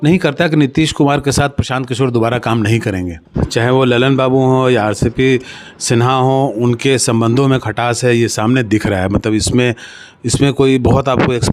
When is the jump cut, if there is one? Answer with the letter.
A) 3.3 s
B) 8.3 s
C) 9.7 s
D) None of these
A